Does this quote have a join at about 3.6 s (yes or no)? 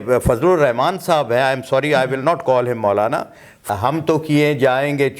yes